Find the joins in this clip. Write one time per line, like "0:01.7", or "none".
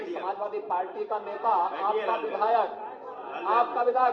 none